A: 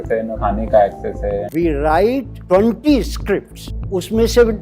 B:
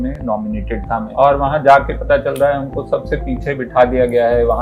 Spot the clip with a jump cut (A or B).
A